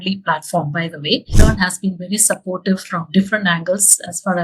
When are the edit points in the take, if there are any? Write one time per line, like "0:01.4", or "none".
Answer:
0:01.3